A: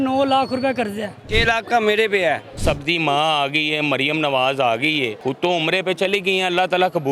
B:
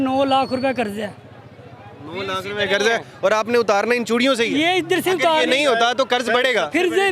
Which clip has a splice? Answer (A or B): A